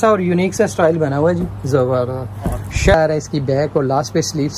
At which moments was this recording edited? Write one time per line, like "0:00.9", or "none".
0:02.9